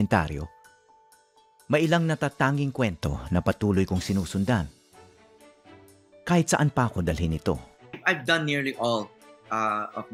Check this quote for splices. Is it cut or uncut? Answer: uncut